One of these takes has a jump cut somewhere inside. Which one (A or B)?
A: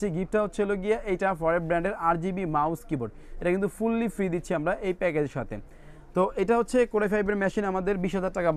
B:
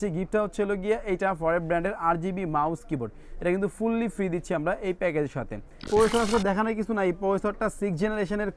B